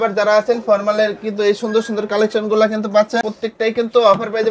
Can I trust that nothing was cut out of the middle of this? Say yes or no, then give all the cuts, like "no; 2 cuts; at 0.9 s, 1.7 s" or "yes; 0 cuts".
no; 1 cut; at 3.3 s